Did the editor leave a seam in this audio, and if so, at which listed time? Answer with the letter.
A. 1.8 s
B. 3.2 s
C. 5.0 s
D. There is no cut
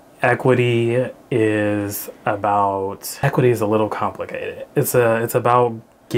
B